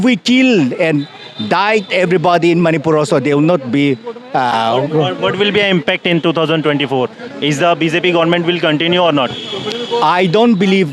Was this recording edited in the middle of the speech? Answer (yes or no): no